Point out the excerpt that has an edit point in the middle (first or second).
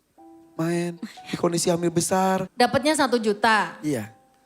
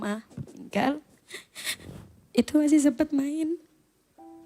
first